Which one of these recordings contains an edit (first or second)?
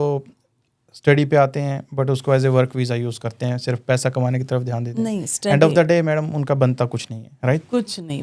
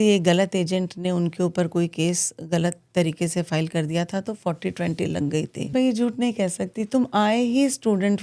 second